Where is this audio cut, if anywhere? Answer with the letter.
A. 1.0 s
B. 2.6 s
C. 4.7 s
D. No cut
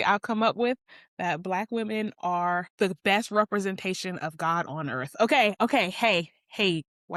D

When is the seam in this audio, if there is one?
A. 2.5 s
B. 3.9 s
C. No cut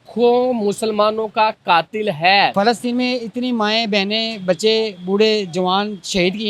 A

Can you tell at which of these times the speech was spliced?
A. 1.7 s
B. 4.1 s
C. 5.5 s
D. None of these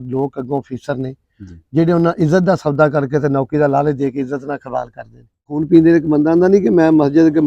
C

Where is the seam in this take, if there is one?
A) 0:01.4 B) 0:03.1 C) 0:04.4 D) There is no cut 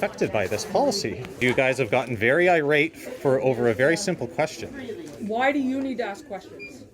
A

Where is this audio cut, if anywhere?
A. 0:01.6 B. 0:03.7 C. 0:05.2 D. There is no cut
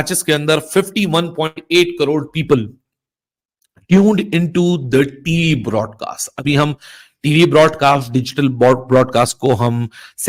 D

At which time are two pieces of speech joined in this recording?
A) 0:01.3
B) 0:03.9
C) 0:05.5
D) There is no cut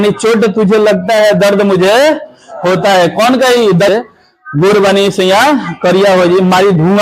B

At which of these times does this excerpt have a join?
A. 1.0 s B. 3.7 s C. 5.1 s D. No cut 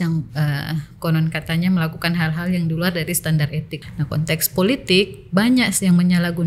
B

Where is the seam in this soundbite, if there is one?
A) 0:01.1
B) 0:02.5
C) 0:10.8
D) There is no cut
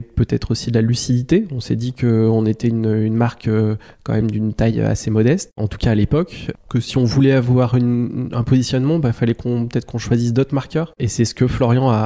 C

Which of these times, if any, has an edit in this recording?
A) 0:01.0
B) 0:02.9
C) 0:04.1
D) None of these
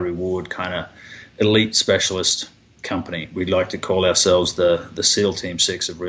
D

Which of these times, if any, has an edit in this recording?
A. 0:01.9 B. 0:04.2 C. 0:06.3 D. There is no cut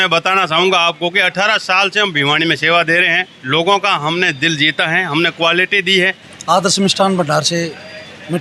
C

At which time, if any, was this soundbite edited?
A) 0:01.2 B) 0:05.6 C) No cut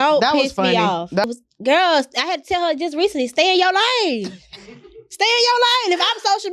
A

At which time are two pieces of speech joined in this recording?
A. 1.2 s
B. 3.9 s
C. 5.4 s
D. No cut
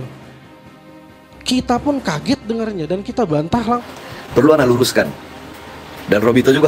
B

